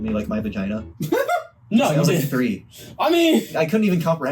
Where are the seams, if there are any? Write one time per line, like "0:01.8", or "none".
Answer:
0:00.9
0:03.5